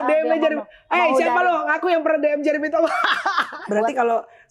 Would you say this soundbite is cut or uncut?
cut